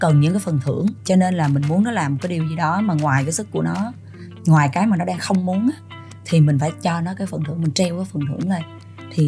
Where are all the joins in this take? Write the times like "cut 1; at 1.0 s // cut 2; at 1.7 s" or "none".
cut 1; at 1.0 s